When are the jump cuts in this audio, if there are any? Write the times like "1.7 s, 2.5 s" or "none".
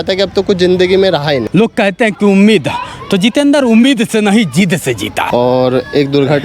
1.4 s, 5.2 s